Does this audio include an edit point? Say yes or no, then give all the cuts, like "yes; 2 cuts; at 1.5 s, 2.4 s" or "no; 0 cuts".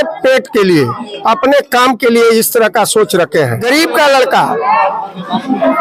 no; 0 cuts